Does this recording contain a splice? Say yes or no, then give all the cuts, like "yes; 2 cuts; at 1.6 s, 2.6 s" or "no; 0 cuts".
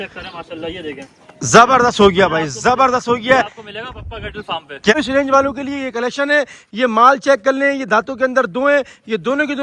yes; 1 cut; at 4.9 s